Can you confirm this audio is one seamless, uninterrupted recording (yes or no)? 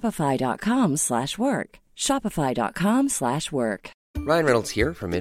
yes